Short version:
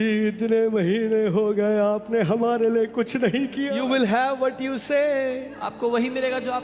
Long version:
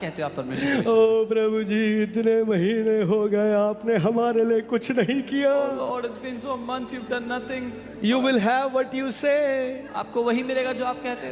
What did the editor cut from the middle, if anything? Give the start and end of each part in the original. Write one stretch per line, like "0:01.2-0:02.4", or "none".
0:05.5-0:08.0